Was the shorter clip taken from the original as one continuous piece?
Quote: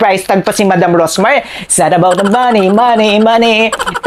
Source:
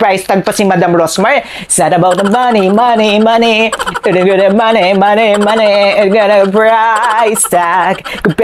yes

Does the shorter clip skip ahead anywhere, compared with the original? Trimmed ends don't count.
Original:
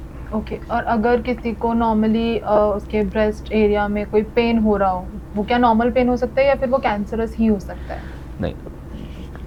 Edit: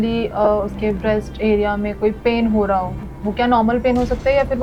no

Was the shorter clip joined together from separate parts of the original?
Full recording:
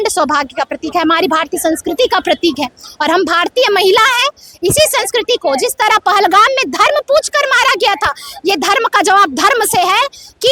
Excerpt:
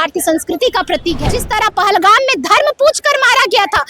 yes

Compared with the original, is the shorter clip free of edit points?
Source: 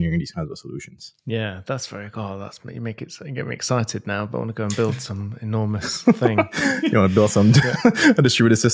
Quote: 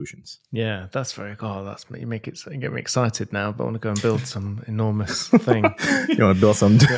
yes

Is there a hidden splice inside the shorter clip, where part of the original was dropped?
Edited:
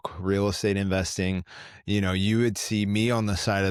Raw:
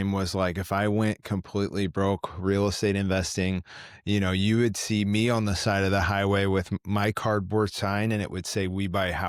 no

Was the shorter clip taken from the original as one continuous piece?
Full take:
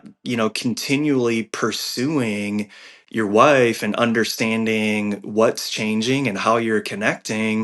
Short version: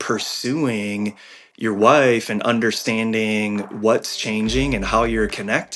yes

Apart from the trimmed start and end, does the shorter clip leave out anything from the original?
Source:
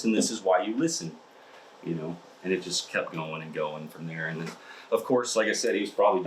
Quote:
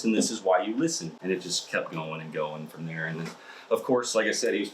yes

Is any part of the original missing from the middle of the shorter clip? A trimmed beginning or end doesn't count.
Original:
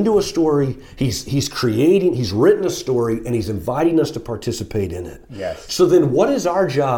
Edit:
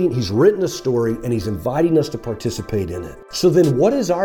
yes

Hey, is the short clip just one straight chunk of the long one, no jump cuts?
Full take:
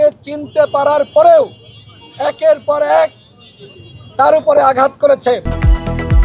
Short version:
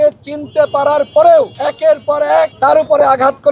no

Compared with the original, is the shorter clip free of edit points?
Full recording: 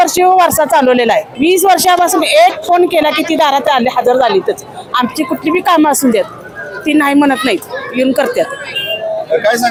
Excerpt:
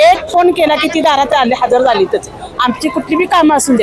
yes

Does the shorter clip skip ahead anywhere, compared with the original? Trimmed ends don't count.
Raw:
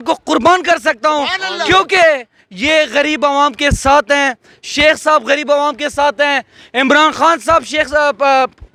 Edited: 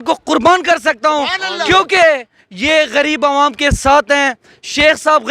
no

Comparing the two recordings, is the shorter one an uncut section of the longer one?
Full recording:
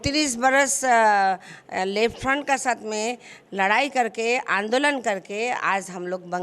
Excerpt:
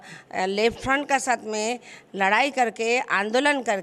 yes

